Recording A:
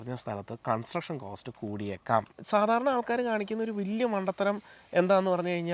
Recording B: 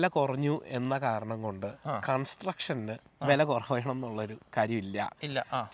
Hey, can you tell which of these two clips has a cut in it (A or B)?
A